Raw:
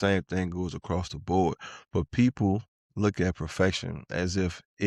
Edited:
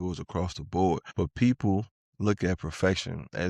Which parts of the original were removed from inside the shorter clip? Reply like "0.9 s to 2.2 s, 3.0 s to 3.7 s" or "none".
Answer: 1.6 s to 1.8 s